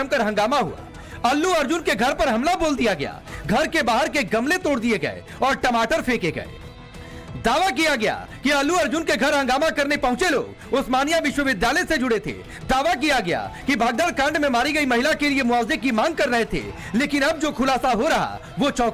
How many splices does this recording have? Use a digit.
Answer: 0